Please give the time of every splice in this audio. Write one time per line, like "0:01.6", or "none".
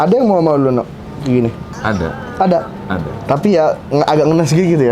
0:01.7